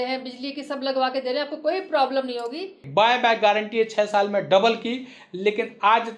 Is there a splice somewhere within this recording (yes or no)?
yes